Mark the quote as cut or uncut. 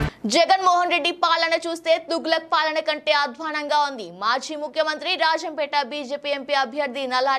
uncut